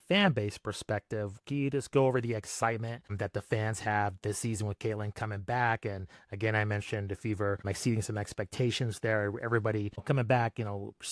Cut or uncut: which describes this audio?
cut